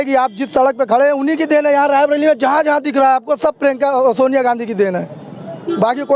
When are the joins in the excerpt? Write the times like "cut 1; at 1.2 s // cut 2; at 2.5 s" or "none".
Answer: none